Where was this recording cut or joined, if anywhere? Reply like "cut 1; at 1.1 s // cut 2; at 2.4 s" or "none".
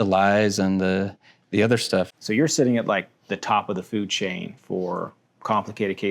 cut 1; at 2.1 s